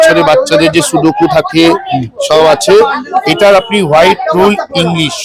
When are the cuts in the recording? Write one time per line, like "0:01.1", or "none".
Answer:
none